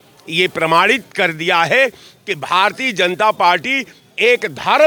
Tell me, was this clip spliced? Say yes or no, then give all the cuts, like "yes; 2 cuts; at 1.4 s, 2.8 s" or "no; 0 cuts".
no; 0 cuts